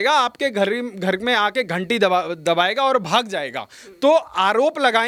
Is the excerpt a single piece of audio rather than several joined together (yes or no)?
yes